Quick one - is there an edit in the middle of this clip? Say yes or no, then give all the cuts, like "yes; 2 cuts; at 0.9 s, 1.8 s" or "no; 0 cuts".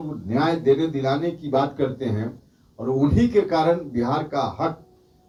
no; 0 cuts